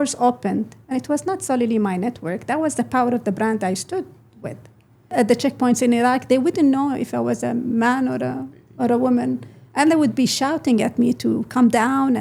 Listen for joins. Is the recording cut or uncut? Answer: cut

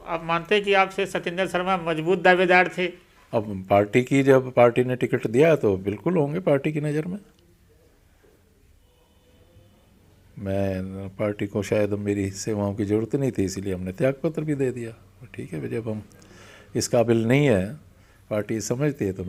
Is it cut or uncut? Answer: uncut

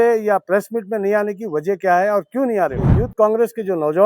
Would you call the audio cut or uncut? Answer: cut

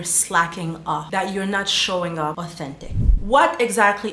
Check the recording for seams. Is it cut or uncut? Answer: cut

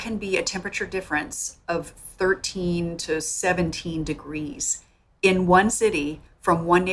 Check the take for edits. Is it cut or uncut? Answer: uncut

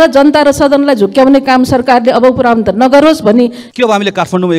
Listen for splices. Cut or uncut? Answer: cut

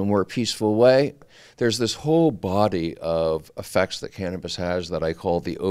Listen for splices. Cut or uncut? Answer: cut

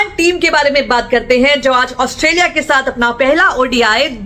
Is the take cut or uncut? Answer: uncut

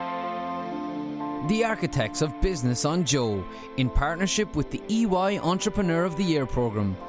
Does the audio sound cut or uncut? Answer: uncut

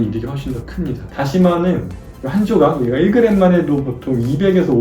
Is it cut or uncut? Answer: cut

